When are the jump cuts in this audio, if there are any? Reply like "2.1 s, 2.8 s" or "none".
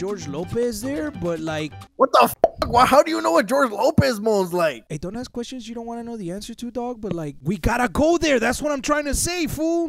7.4 s